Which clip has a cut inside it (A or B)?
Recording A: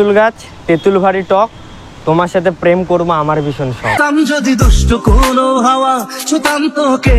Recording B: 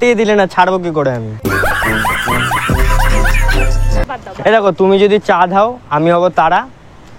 B